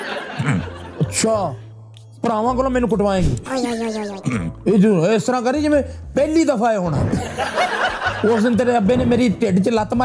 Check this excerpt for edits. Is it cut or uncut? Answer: uncut